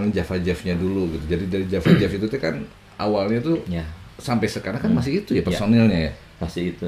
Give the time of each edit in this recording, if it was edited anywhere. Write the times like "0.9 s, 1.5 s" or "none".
none